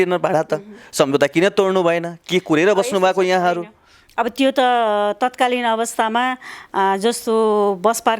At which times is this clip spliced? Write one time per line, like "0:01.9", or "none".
none